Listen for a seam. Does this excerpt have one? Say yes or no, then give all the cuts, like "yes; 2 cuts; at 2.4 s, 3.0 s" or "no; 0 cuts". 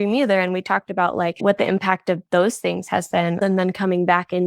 yes; 1 cut; at 3.4 s